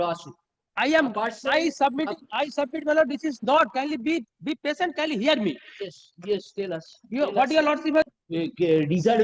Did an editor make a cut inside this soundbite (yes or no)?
yes